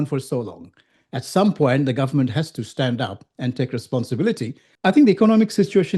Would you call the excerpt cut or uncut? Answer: cut